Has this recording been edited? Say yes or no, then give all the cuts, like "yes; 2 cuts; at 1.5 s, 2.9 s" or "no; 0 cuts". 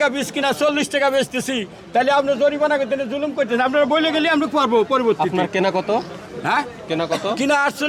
no; 0 cuts